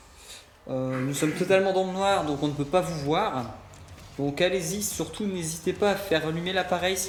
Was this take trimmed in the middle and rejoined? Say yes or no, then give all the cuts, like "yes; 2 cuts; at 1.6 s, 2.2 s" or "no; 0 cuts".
no; 0 cuts